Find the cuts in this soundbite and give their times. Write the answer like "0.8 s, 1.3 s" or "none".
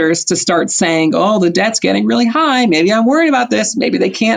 none